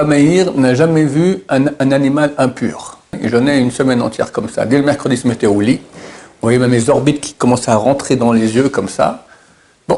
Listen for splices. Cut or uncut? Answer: cut